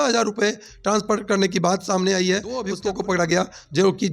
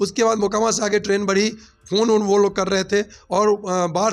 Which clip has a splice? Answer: first; 1 cut; at 2.7 s

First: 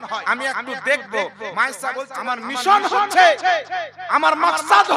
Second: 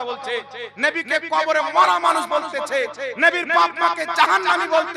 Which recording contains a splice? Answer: first; 1 cut; at 2.3 s

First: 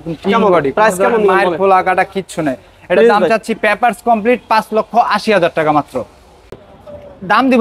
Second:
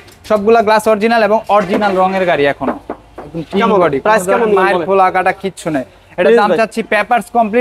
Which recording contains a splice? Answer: first; 1 cut; at 6.5 s

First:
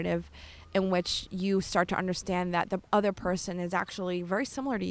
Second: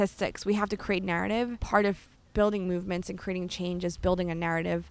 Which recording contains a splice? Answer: second; 1 cut; at 1.6 s

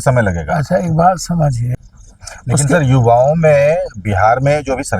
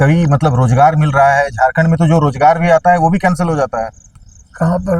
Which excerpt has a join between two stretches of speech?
first; 1 cut; at 1.6 s

